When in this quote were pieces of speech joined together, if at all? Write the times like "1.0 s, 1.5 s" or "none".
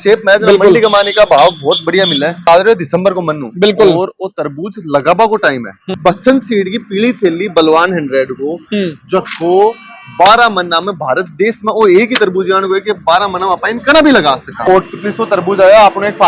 2.5 s, 5.8 s, 14.6 s